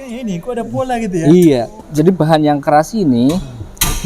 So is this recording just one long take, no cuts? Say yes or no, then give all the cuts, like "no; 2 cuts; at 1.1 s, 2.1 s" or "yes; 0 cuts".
no; 1 cut; at 1.8 s